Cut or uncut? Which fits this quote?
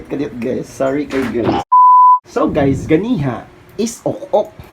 cut